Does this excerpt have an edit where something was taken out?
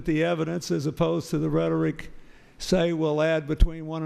yes; 1 cut; at 2.6 s

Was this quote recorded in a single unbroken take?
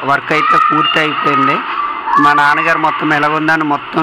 yes; 0 cuts

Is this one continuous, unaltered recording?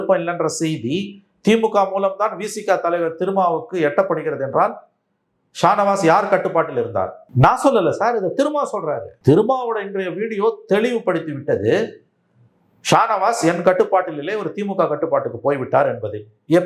no; 2 cuts; at 7.2 s, 9.1 s

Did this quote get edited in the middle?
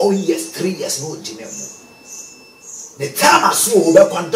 no; 0 cuts

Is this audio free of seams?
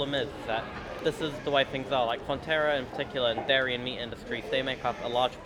yes; 0 cuts

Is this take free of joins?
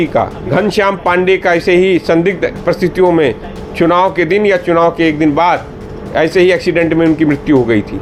yes; 0 cuts

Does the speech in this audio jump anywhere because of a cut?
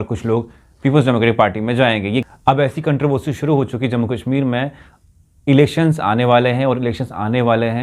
yes; 1 cut; at 2.2 s

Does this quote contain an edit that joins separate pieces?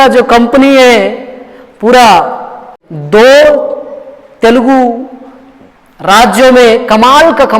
yes; 1 cut; at 2.7 s

